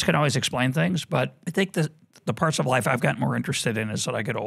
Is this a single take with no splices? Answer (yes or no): no